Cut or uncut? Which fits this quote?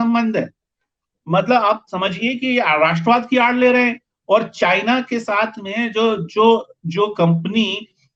uncut